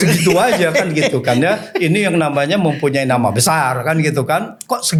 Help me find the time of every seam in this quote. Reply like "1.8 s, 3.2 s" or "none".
none